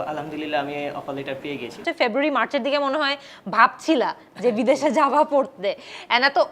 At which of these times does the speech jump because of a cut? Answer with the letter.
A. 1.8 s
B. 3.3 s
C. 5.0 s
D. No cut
A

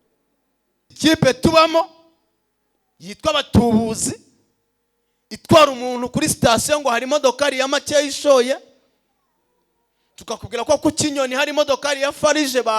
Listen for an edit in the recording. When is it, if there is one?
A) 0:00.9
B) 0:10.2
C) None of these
A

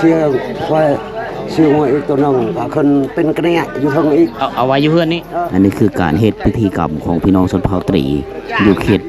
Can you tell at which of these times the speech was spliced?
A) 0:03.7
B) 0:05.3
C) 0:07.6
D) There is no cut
B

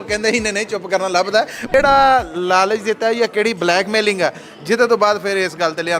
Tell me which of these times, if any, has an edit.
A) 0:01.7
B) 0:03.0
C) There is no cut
A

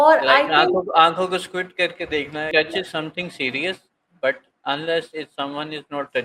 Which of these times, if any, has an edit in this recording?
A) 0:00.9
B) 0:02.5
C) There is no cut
B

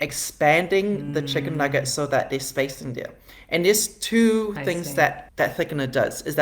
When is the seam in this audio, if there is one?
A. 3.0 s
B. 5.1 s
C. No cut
C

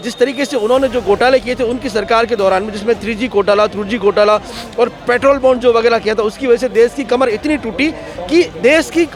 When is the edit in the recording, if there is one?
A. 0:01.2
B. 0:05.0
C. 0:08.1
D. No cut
D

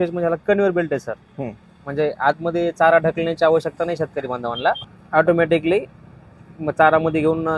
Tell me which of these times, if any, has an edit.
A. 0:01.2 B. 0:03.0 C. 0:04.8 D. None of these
C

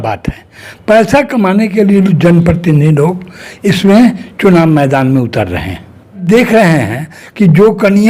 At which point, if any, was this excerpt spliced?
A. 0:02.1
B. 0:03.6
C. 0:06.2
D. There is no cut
C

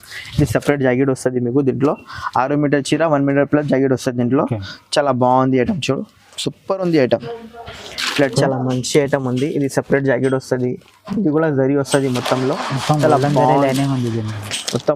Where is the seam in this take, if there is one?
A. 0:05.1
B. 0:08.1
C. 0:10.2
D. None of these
B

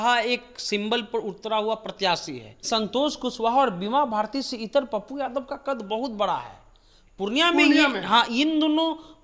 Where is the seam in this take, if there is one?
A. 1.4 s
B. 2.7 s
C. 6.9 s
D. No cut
B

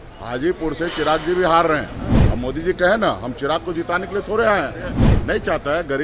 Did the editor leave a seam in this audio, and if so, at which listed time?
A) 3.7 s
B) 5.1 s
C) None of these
B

